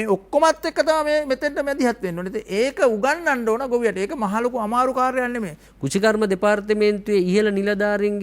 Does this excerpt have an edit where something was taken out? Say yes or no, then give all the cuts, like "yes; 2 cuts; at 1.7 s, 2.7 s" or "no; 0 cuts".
yes; 1 cut; at 5.6 s